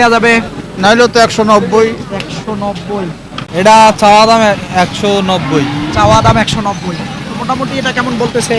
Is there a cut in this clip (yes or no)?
yes